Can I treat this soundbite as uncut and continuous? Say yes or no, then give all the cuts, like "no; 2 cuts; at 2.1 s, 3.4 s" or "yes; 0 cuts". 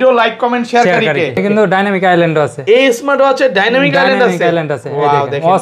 no; 1 cut; at 1.4 s